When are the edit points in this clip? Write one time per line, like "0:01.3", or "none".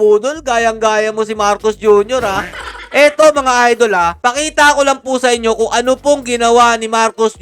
none